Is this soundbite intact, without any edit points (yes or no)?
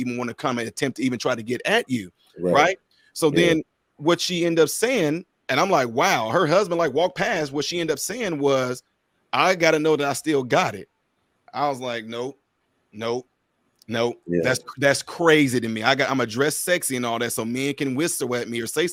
yes